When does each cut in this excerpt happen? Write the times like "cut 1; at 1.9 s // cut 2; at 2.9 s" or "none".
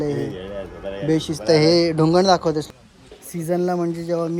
cut 1; at 2.7 s